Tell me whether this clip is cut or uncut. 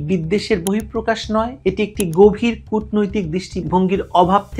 uncut